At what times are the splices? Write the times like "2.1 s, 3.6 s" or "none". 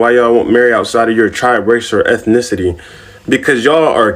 none